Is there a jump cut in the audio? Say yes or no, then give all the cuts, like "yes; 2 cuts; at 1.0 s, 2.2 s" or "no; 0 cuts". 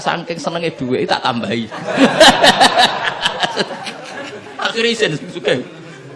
yes; 1 cut; at 4.4 s